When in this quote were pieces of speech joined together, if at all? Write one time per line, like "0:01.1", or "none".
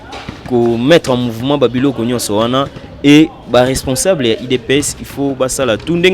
none